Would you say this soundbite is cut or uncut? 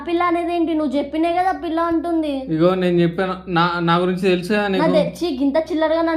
uncut